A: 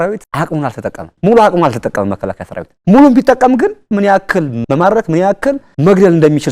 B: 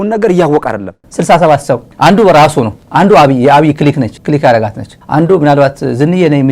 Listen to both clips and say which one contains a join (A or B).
B